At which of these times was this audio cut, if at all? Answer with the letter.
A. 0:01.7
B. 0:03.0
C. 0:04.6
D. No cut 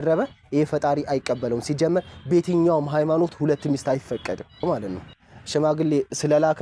C